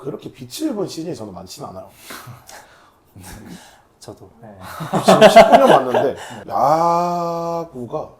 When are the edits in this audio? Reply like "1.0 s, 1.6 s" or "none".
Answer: 6.4 s